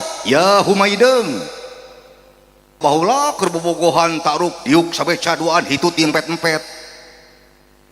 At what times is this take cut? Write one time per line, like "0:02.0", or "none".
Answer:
0:02.8